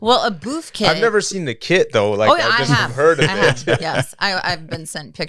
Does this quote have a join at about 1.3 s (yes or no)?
no